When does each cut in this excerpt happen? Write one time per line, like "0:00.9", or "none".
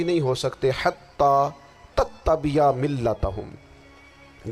none